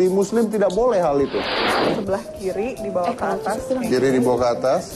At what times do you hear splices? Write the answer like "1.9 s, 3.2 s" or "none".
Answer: 1.7 s